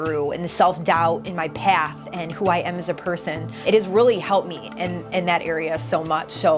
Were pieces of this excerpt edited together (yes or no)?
yes